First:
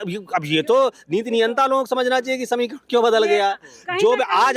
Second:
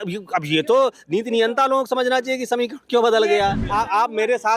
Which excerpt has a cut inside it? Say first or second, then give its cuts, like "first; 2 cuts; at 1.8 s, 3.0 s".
second; 1 cut; at 3.6 s